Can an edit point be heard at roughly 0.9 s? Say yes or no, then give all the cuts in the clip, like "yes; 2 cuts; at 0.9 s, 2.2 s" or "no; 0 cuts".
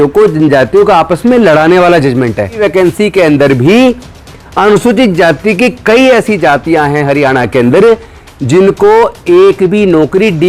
no; 1 cut; at 2.6 s